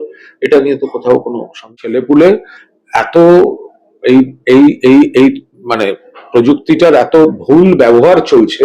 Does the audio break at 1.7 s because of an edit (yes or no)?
yes